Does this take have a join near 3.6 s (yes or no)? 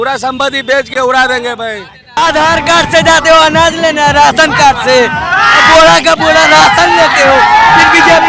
no